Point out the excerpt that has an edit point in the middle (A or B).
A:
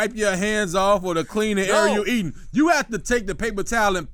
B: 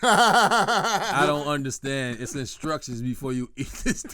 B